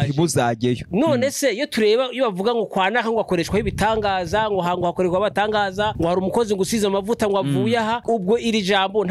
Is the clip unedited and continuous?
yes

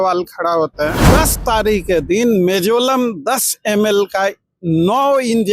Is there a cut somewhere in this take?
yes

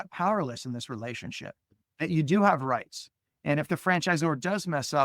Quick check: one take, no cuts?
yes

